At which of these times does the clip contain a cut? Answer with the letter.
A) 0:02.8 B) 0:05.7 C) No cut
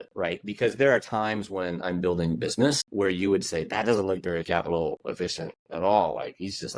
A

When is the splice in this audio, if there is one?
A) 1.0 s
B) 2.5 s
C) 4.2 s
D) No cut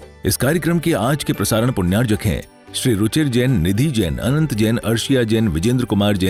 D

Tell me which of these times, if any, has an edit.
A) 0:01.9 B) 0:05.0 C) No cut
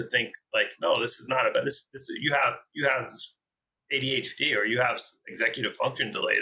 C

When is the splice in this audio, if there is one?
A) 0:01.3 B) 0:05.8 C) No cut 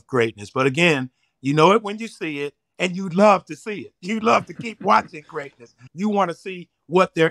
B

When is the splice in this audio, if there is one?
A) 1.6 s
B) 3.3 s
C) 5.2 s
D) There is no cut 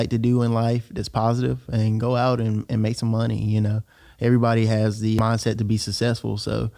C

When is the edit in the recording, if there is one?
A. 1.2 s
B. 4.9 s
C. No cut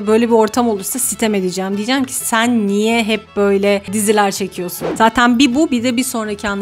B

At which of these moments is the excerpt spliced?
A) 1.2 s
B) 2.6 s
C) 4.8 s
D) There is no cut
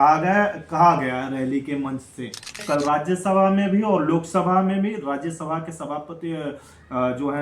B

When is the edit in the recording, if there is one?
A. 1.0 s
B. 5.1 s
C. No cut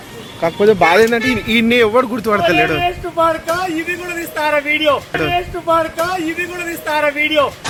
C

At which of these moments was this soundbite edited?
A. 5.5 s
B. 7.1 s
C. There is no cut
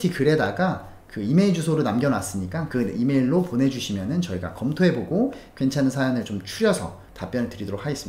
B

